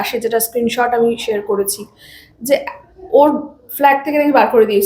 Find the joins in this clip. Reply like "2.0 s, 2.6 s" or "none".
none